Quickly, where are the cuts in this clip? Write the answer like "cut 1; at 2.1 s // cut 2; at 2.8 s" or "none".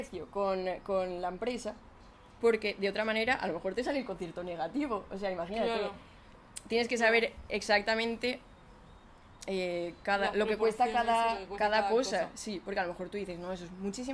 none